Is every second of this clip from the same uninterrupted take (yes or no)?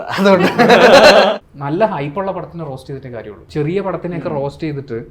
no